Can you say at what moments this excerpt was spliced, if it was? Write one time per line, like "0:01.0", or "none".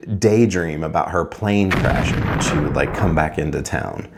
none